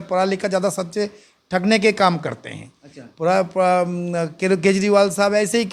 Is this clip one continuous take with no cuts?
yes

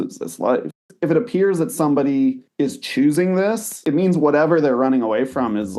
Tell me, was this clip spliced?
yes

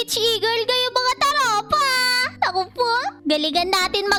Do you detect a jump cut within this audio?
no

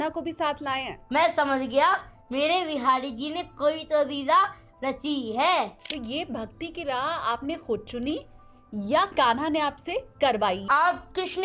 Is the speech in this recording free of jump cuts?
no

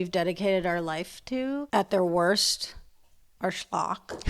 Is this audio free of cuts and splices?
no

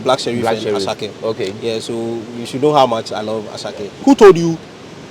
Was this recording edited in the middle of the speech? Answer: yes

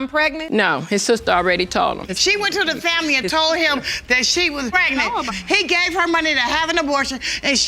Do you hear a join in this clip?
no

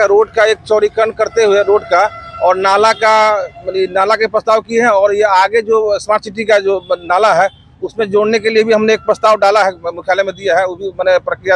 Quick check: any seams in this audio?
no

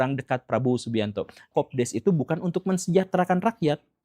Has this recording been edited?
yes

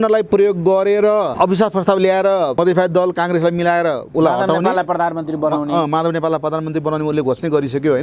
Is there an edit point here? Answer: yes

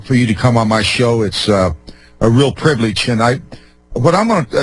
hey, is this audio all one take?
yes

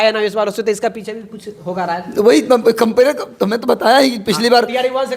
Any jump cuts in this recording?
no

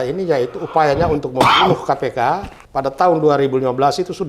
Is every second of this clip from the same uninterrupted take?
no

